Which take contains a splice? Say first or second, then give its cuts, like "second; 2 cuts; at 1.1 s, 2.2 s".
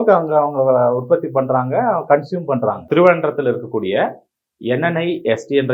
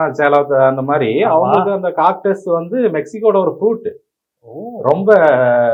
first; 1 cut; at 2.8 s